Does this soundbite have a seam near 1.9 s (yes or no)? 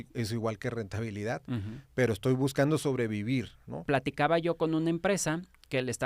no